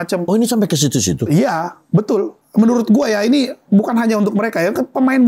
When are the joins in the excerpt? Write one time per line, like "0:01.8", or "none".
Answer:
0:02.4